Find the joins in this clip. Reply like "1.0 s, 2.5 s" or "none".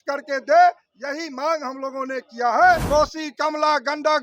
2.8 s